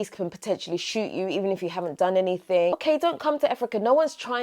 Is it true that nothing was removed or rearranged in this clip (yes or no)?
no